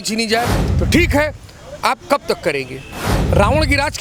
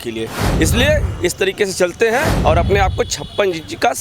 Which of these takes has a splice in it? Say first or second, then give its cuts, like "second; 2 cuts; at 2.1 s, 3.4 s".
second; 1 cut; at 2.3 s